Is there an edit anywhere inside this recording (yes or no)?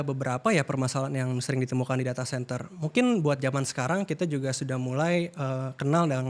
no